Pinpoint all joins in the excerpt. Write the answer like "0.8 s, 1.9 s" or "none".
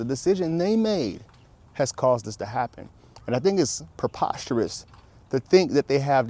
none